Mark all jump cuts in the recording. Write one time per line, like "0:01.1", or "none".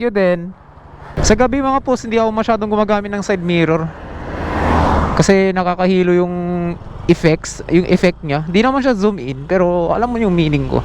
0:01.2